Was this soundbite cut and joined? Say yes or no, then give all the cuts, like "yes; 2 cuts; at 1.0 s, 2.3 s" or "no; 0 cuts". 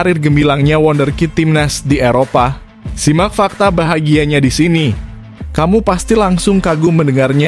no; 0 cuts